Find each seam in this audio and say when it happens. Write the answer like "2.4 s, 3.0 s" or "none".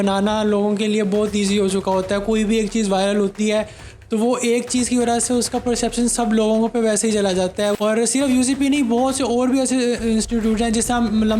7.7 s